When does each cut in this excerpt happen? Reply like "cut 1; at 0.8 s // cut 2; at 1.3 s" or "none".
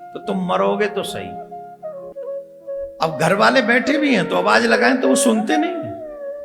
cut 1; at 2.1 s

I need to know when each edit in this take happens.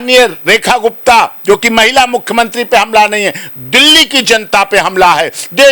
none

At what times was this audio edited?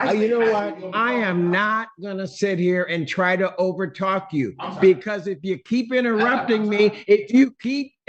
none

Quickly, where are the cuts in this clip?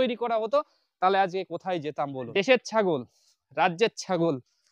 cut 1; at 2.2 s

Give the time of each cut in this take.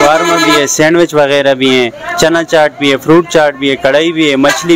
none

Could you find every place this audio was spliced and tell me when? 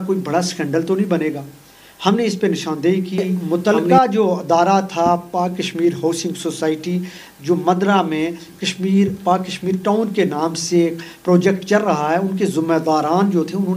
cut 1; at 3.4 s

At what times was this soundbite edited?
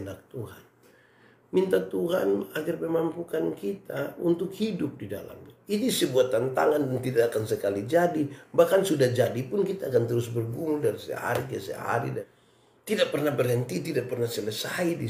cut 1; at 12.2 s

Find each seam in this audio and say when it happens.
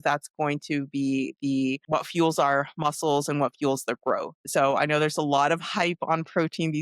cut 1; at 1.9 s

